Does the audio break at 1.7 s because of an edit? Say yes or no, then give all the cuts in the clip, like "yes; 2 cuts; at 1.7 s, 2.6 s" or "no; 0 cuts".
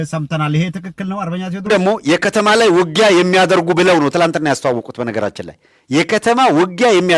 yes; 1 cut; at 1.7 s